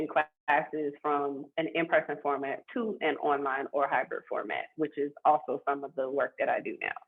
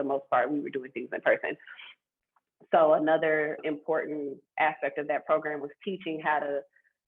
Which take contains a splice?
second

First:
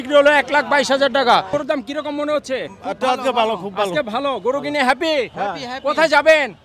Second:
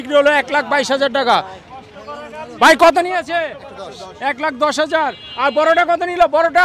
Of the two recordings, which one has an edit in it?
first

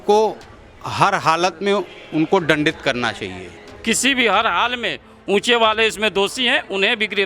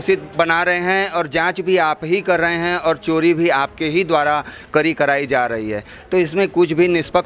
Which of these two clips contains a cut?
first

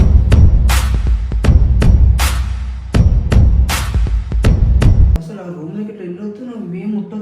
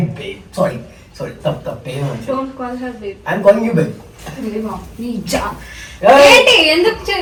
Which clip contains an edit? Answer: first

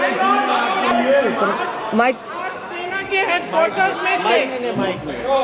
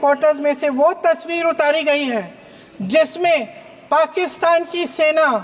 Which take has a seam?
first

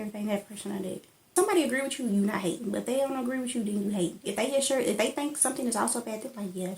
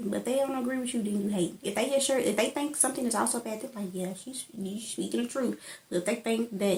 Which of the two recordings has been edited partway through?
first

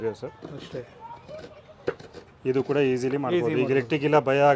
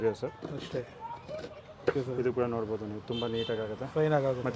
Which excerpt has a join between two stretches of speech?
second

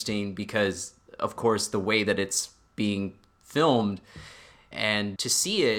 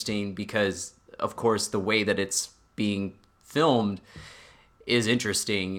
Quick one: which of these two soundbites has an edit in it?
first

